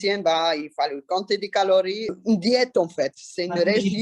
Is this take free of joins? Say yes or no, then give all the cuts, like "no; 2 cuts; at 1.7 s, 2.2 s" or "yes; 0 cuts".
no; 1 cut; at 2.1 s